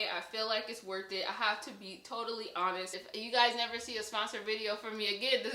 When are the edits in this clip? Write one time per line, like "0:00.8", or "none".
0:02.9